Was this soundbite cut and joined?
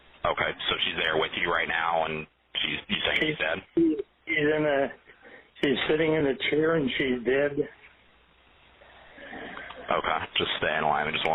yes; 1 cut; at 10.2 s

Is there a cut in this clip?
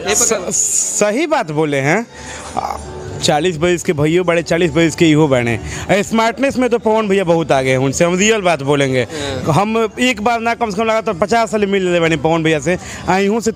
no; 0 cuts

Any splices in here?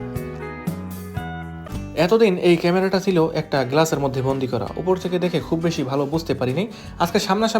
yes; 1 cut; at 1.6 s

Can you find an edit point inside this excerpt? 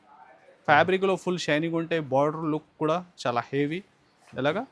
no; 0 cuts

